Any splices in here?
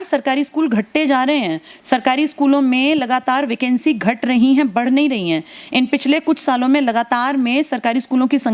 no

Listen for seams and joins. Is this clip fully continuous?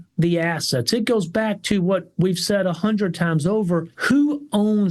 no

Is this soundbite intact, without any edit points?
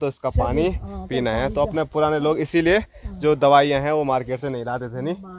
yes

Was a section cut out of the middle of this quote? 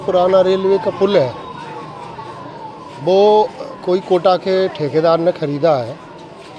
no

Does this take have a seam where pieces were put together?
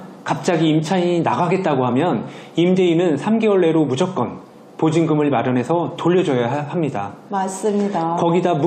no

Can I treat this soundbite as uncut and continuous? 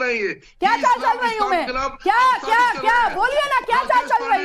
yes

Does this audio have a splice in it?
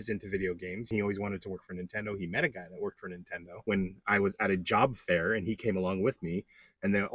yes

